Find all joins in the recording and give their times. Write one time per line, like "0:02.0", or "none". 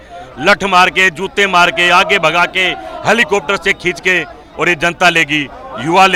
none